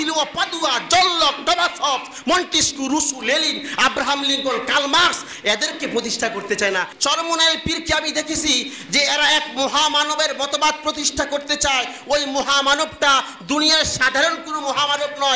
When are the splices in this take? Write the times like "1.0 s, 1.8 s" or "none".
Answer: 6.9 s